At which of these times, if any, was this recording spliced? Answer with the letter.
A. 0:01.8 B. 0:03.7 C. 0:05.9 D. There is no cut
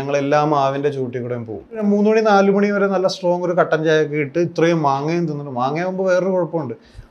A